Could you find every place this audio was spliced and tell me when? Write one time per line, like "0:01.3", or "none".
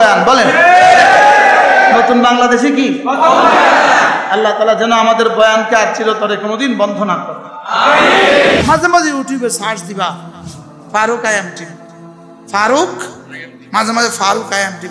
0:08.6